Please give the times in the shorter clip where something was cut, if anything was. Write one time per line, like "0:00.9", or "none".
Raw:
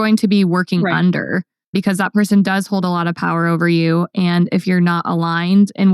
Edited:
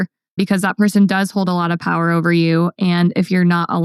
none